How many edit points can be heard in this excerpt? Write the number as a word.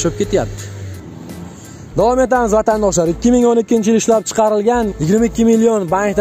one